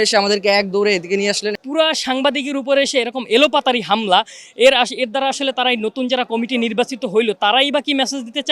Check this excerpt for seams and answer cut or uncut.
cut